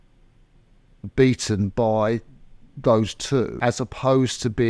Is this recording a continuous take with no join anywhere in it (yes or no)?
no